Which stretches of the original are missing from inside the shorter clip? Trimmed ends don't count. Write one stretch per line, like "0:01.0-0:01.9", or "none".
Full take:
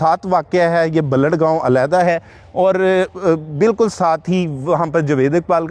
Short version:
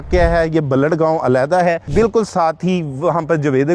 0:02.2-0:03.5